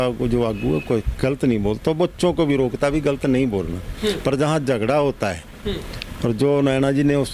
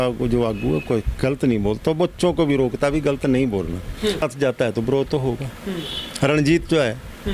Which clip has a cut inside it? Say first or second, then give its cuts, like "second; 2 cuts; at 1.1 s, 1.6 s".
second; 1 cut; at 4.2 s